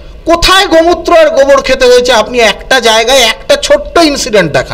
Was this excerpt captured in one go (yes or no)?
yes